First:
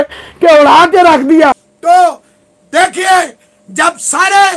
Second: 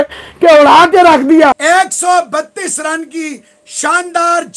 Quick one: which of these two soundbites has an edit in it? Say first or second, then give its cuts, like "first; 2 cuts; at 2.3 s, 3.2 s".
second; 1 cut; at 1.6 s